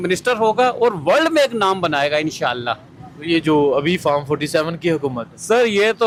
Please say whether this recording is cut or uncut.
uncut